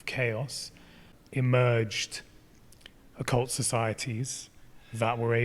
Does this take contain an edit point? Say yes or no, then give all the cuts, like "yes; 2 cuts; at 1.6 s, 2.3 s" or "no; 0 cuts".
yes; 1 cut; at 1.1 s